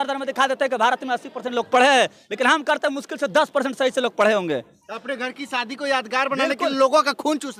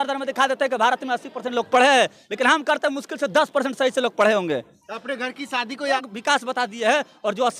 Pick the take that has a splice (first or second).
second